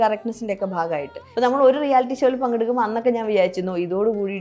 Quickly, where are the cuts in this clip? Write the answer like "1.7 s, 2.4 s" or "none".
1.2 s